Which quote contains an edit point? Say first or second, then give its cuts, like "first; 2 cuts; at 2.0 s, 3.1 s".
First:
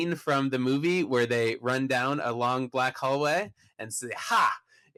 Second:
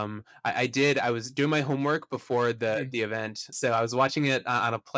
second; 1 cut; at 3.5 s